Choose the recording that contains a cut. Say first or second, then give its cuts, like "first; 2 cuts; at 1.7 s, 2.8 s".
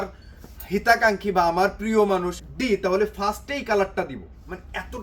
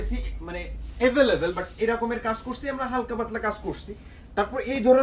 first; 1 cut; at 2.4 s